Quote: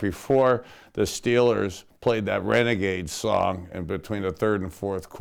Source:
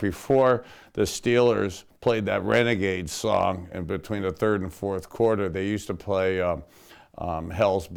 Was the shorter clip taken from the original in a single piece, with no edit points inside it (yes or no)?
yes